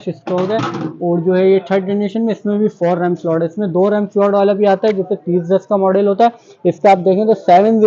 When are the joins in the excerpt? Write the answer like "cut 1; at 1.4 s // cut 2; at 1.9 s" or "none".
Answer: none